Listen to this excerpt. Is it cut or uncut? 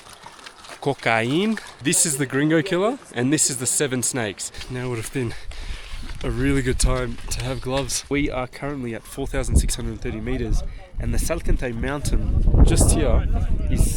cut